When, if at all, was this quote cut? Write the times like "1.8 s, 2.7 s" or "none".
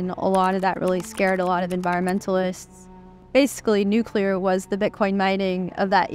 3.2 s